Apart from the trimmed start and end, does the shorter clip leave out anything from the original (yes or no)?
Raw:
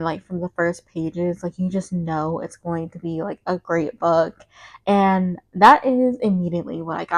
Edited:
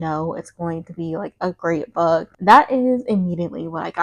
yes